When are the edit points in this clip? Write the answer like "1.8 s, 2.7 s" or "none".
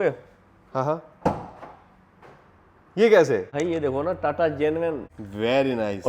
3.5 s, 5.0 s